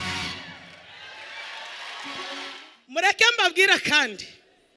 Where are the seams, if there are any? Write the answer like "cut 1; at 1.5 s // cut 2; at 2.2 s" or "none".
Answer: cut 1; at 2.6 s